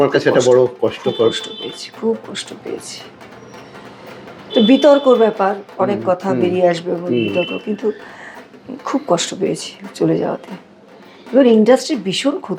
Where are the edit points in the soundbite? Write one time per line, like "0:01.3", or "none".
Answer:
none